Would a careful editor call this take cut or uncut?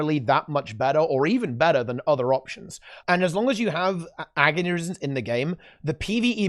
cut